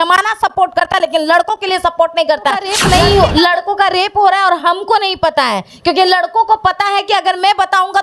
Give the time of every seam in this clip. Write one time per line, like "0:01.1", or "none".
0:02.7